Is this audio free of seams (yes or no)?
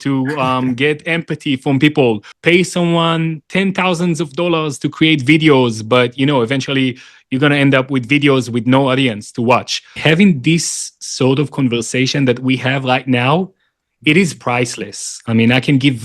no